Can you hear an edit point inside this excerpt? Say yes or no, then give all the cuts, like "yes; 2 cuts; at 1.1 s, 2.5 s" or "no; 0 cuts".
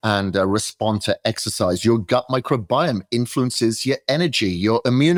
no; 0 cuts